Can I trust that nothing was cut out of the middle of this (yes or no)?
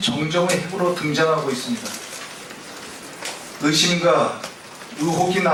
yes